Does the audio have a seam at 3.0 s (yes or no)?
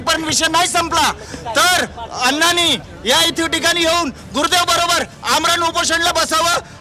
no